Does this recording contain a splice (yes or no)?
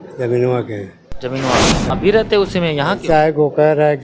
yes